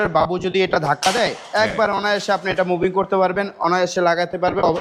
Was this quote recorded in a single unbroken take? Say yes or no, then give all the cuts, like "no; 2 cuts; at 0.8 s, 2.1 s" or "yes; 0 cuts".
yes; 0 cuts